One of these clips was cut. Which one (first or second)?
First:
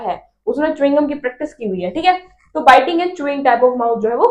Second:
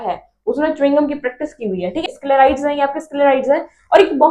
second